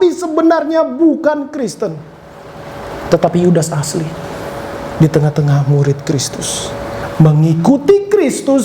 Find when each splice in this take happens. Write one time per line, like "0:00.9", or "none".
0:07.0